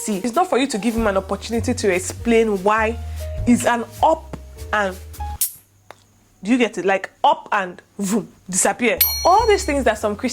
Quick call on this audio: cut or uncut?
cut